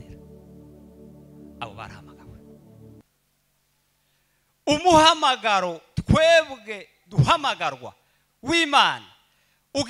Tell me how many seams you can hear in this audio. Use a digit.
1